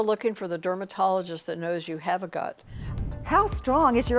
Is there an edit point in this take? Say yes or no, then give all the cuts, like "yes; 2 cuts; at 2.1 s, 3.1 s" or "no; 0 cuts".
yes; 1 cut; at 2.9 s